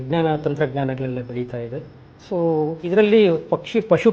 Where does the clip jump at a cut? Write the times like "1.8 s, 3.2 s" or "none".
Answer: none